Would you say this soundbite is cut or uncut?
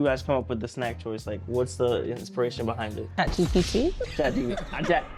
uncut